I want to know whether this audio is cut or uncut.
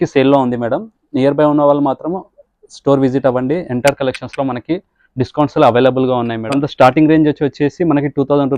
cut